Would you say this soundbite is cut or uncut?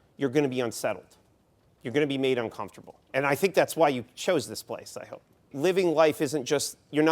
cut